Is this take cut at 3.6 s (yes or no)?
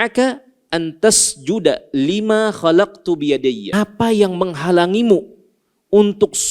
yes